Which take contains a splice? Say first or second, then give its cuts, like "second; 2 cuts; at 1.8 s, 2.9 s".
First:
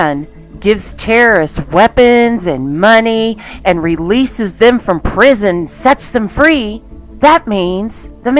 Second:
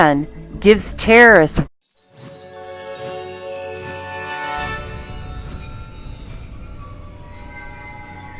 first; 1 cut; at 1.7 s